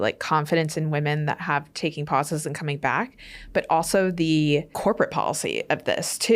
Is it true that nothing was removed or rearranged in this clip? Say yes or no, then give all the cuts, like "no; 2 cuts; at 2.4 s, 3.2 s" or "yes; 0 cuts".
no; 1 cut; at 4.7 s